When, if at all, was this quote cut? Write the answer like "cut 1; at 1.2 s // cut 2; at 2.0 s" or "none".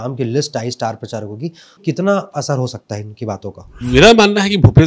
cut 1; at 1.8 s // cut 2; at 3.7 s